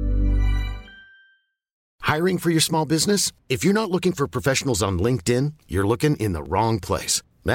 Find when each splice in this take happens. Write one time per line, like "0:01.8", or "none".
0:01.9